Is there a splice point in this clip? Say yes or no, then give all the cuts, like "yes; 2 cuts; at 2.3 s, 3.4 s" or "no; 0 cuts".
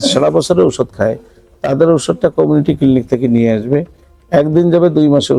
no; 0 cuts